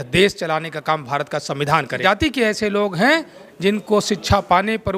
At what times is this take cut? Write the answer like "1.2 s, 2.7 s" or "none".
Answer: 2.0 s